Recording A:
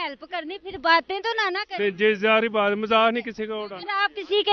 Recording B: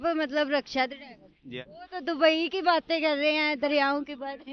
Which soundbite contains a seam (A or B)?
B